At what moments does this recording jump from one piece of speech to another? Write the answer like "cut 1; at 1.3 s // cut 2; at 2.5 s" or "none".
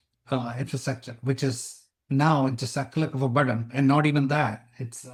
none